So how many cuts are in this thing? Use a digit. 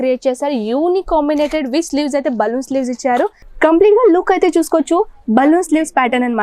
1